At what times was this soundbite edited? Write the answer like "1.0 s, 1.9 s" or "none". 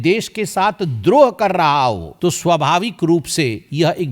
2.1 s